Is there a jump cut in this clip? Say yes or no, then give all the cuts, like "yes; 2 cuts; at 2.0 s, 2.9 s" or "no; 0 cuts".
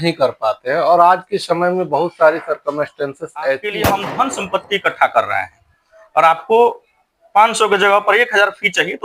yes; 1 cut; at 3.7 s